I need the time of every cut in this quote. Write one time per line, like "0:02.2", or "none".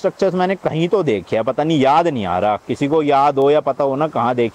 none